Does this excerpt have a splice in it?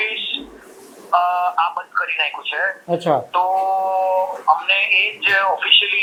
no; 0 cuts

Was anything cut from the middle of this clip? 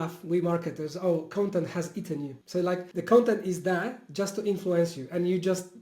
yes; 1 cut; at 2.7 s

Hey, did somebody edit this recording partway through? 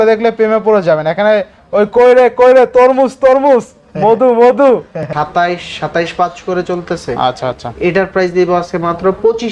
yes; 1 cut; at 5.1 s

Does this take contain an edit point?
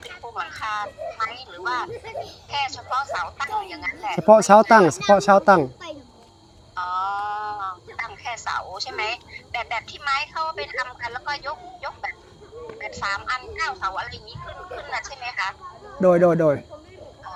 no; 0 cuts

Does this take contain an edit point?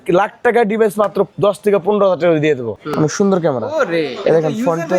yes; 2 cuts; at 1.3 s, 2.8 s

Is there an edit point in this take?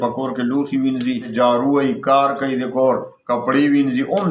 yes; 1 cut; at 1.3 s

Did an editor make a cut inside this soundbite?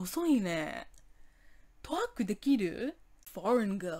yes; 1 cut; at 3.1 s

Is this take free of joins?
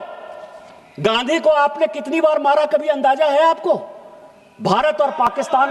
yes; 0 cuts

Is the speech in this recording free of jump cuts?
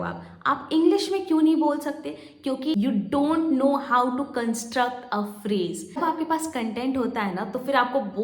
no; 2 cuts; at 2.7 s, 6.0 s

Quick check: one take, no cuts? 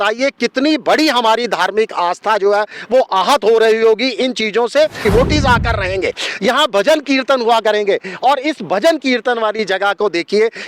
no; 1 cut; at 5.0 s

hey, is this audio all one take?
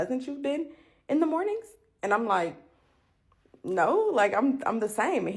yes; 0 cuts

